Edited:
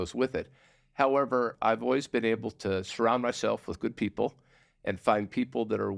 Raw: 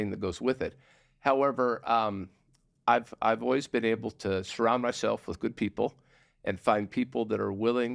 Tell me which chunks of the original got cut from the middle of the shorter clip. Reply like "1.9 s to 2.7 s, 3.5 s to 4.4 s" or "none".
1.8 s to 3.1 s